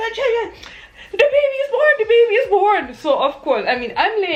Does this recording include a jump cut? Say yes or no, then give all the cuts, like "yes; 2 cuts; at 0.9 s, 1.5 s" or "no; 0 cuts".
no; 0 cuts